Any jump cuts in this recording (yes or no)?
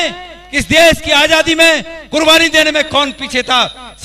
no